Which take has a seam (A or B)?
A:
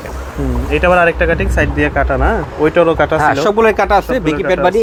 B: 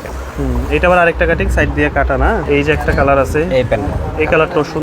B